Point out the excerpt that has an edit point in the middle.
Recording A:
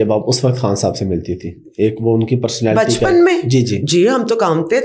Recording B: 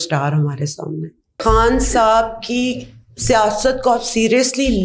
B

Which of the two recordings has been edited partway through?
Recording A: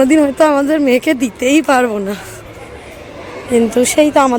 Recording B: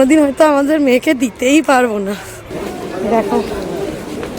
B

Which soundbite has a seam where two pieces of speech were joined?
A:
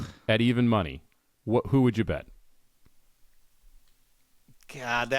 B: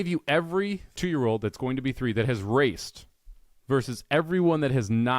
B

